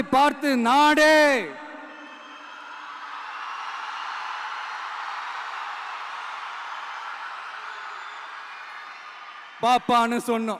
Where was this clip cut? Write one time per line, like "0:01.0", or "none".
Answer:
none